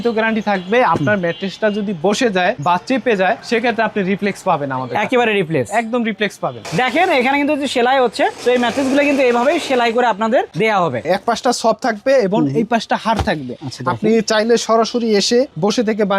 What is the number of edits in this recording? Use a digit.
3